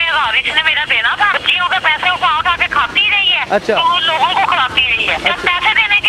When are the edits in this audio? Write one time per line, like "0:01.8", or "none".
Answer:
0:01.3
0:03.4
0:05.2